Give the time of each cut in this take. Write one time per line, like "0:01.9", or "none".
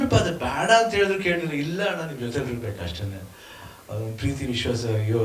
none

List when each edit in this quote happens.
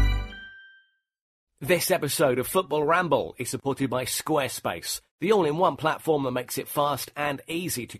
0:01.5

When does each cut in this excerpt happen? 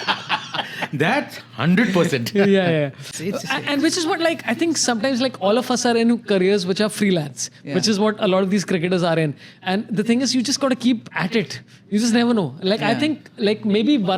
0:03.2

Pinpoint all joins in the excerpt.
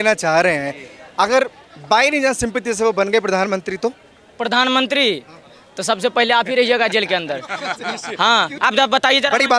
0:08.5

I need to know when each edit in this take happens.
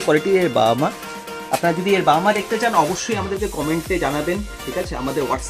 none

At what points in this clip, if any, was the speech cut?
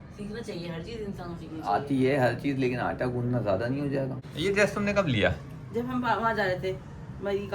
0:04.2

